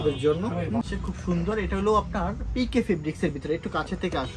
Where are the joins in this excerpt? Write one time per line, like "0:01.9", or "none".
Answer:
0:01.0